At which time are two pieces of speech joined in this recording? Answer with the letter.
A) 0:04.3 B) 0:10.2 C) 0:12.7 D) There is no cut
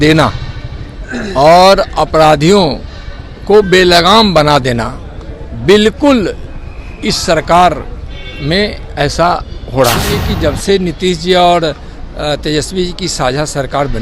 B